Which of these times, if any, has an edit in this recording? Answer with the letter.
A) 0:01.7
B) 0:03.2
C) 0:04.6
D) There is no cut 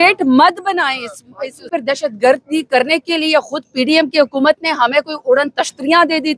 A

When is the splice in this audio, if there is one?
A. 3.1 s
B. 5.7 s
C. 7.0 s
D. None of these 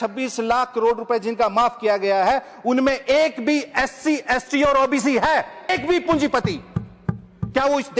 B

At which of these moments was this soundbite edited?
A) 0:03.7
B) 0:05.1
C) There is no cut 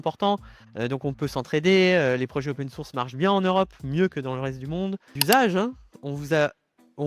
B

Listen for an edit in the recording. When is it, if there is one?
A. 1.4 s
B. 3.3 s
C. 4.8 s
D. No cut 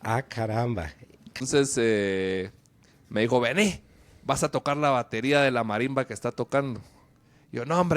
A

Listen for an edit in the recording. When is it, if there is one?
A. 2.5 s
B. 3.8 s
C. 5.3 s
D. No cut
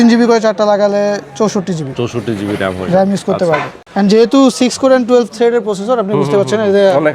B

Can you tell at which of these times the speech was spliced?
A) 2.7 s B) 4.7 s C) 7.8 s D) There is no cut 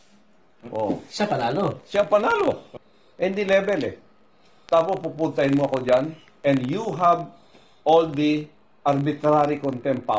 A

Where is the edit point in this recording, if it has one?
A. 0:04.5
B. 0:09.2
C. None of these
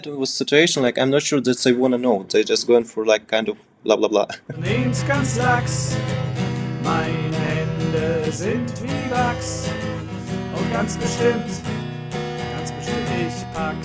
A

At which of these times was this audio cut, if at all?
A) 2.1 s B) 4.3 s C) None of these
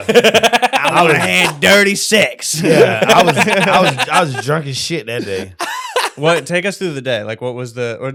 C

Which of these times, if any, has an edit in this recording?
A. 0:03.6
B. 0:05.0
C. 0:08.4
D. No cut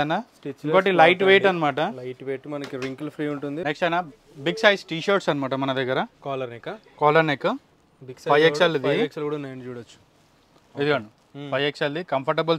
A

